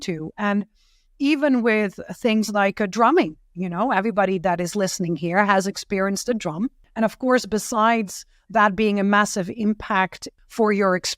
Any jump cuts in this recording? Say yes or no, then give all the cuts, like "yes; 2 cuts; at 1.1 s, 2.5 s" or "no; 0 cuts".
yes; 2 cuts; at 6.8 s, 10.2 s